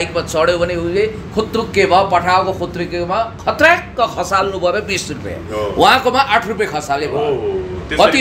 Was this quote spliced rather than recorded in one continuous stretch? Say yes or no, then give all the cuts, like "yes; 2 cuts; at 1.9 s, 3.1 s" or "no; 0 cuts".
no; 0 cuts